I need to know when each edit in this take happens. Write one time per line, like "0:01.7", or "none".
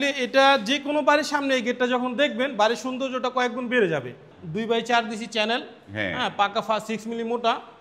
0:04.3